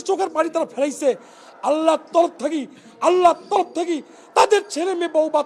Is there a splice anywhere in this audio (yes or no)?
no